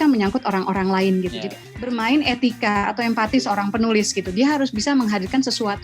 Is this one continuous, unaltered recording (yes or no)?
no